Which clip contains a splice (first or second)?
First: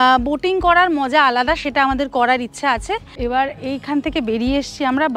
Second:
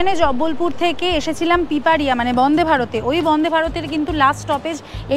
first